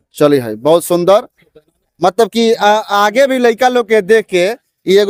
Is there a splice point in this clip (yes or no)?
no